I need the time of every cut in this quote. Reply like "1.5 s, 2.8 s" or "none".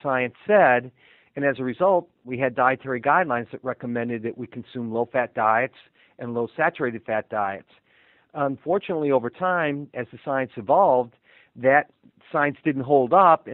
2.2 s